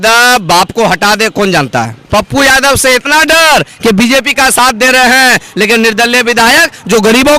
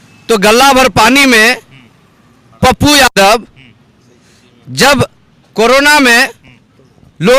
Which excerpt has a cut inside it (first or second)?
first